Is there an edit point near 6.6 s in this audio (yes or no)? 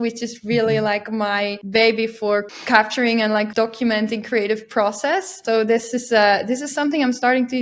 no